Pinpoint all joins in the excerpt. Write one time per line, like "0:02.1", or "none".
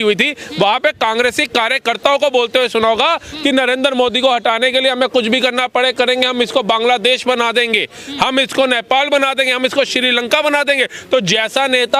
none